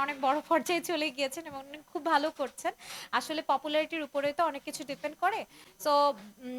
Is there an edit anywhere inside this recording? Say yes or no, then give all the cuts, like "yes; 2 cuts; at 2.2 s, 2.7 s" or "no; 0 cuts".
no; 0 cuts